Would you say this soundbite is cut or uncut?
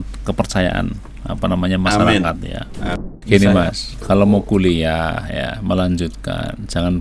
cut